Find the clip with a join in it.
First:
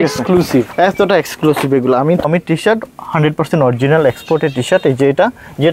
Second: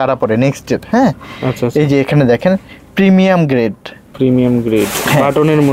first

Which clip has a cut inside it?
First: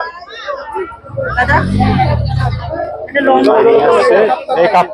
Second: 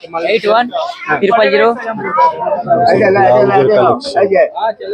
second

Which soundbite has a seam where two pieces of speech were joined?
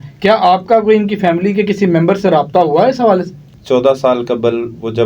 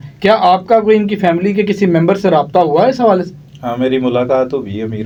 first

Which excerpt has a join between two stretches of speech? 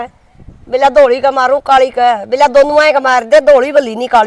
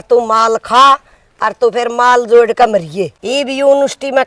second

